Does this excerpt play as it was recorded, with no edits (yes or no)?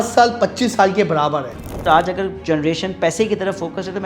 no